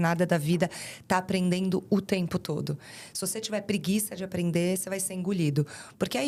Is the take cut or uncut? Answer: uncut